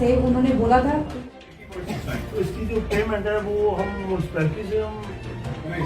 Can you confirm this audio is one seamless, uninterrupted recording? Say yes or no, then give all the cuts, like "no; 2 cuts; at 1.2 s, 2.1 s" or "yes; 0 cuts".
no; 1 cut; at 1.4 s